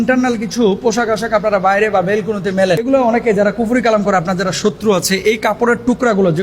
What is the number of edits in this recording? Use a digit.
1